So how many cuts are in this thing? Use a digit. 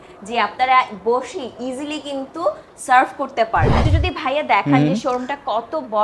1